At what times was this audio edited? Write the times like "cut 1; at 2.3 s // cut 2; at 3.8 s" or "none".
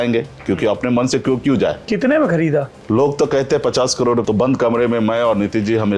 cut 1; at 2.8 s // cut 2; at 4.2 s